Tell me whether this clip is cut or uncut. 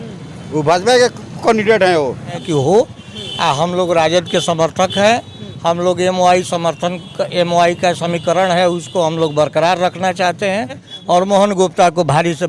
cut